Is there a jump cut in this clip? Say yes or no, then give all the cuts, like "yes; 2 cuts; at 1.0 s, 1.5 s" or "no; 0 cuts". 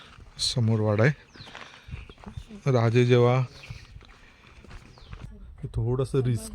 yes; 1 cut; at 5.3 s